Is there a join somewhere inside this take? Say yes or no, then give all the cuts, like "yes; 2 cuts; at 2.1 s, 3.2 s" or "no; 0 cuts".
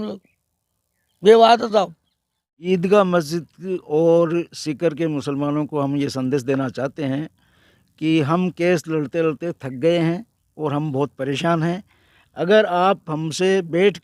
yes; 1 cut; at 2.6 s